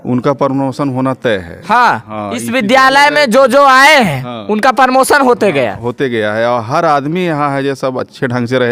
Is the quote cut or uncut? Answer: uncut